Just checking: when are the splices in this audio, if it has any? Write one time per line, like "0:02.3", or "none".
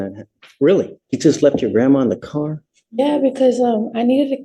0:01.0

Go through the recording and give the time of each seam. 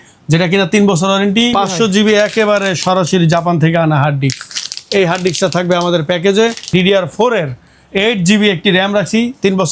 0:01.6
0:06.7

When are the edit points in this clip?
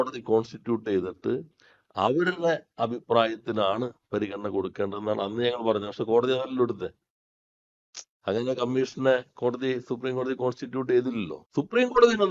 0:11.3

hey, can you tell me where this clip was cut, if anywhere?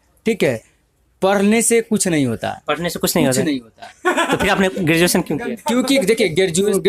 none

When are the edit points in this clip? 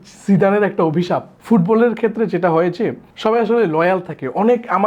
0:01.3
0:03.1

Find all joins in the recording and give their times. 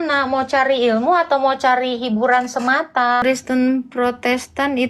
0:03.2

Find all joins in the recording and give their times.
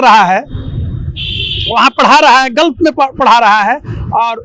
none

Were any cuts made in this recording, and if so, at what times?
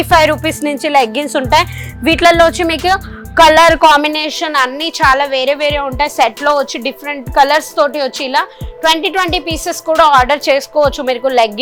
none

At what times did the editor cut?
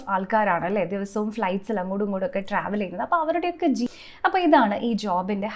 0:03.9

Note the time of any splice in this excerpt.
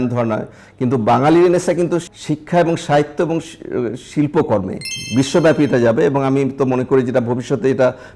0:02.1
0:04.9

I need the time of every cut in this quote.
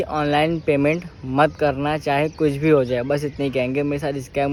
none

